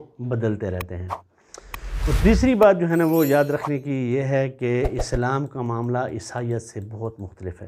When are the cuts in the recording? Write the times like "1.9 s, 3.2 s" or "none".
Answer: none